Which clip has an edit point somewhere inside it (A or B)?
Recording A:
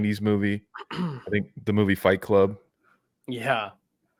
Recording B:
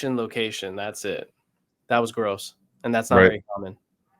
B